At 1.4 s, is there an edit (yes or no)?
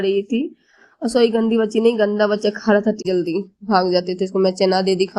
no